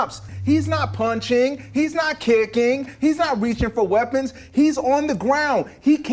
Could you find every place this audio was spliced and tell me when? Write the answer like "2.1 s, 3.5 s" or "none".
none